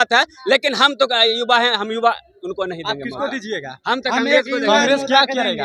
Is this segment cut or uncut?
uncut